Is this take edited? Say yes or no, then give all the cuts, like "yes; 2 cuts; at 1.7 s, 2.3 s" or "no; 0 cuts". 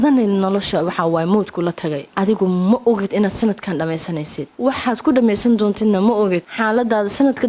yes; 3 cuts; at 2.0 s, 4.4 s, 6.5 s